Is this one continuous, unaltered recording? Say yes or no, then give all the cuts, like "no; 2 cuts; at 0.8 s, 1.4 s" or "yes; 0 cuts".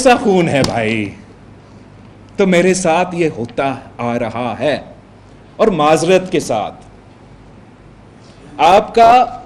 yes; 0 cuts